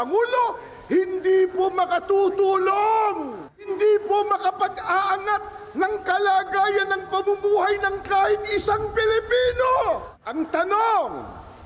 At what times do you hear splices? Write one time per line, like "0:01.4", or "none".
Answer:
0:03.7
0:10.2